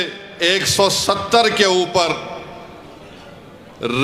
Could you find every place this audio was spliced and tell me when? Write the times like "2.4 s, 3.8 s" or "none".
none